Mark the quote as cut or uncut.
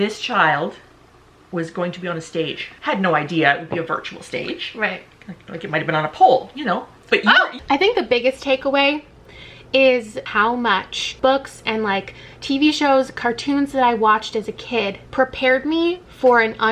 cut